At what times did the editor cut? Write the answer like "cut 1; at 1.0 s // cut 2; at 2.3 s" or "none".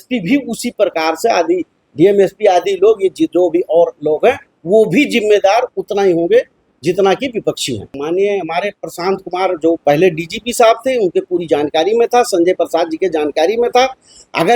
cut 1; at 7.9 s